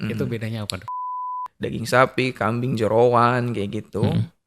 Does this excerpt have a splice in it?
yes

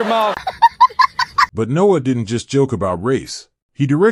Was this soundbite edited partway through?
no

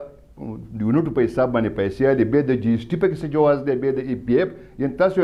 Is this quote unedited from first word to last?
yes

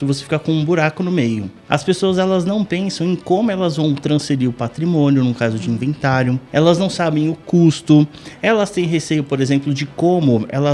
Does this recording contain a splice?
yes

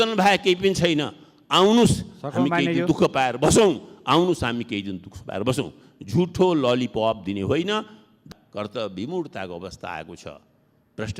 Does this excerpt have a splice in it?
yes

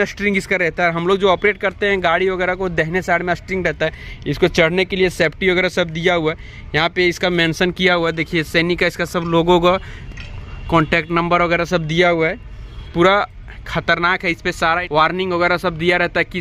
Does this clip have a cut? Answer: no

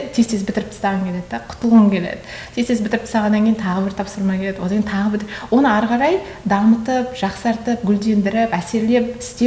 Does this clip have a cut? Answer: no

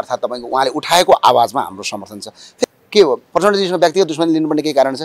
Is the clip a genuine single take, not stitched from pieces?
no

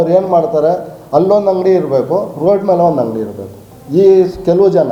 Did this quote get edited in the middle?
no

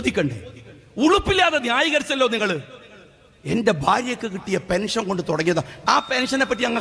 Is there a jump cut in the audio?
yes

